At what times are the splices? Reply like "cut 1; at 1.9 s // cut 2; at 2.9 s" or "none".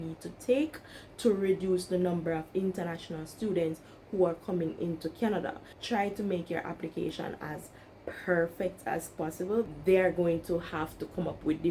cut 1; at 5.7 s // cut 2; at 9.7 s